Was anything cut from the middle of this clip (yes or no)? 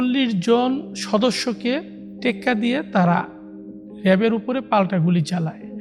yes